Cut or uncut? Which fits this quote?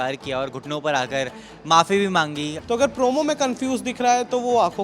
cut